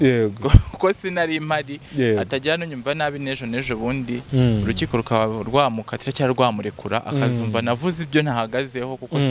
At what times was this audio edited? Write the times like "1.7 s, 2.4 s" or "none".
none